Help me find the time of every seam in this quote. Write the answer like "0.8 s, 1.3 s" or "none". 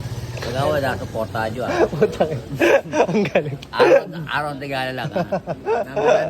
none

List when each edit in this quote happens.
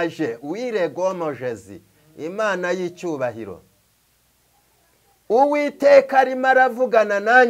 none

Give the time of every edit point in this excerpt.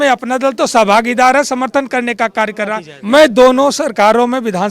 2.9 s

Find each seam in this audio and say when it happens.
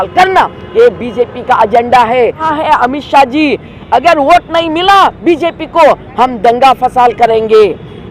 2.5 s

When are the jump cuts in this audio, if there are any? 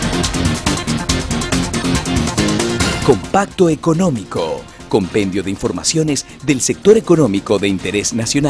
2.7 s

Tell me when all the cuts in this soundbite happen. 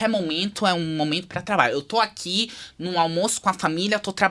none

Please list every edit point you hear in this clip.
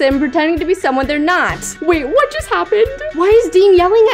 1.7 s, 3.0 s

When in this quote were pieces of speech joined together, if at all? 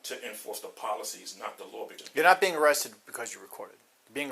2.0 s

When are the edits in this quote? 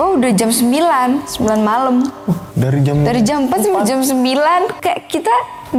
none

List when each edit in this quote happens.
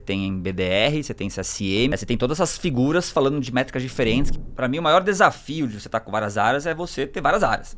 1.9 s, 4.3 s

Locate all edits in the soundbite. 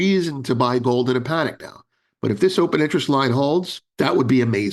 3.8 s

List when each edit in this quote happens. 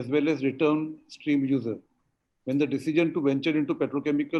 none

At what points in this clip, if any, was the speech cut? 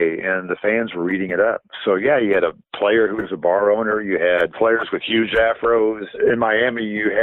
4.5 s, 6.1 s

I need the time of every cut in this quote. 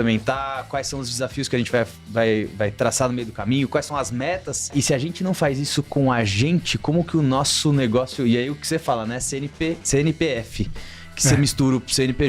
4.7 s, 9.8 s

